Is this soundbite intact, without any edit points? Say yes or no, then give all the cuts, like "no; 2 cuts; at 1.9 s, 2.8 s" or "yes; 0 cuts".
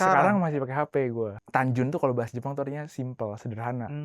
no; 1 cut; at 1.4 s